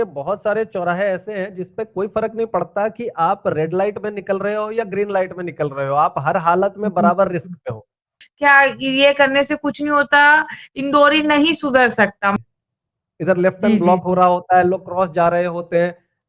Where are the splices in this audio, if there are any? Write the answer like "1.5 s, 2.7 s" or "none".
8.2 s, 12.3 s